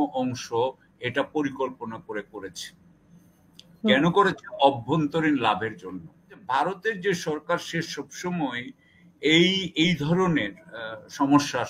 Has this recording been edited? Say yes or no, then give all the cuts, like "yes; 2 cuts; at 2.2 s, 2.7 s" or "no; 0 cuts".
yes; 1 cut; at 6.3 s